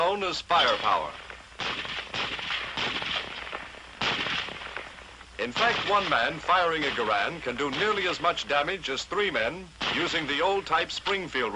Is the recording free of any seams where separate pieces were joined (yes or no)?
no